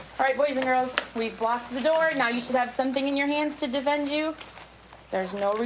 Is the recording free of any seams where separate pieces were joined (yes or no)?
yes